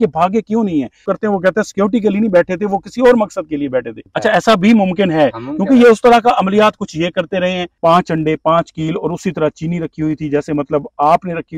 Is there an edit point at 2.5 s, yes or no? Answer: no